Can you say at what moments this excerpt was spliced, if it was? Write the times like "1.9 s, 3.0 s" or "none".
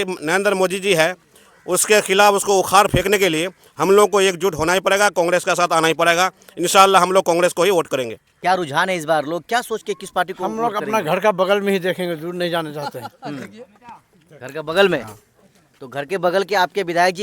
8.2 s